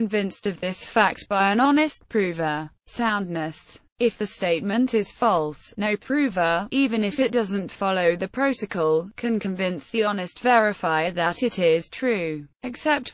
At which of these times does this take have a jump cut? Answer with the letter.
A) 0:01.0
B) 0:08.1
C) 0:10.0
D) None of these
C